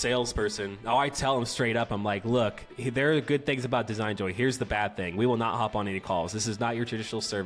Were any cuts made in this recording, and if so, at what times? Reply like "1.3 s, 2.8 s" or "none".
2.7 s